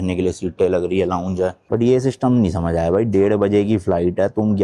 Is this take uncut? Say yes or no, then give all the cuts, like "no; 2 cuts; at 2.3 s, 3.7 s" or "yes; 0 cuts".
no; 1 cut; at 1.6 s